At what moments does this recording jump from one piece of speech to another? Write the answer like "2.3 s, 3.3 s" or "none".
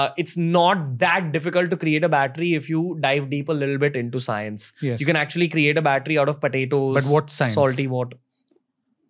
none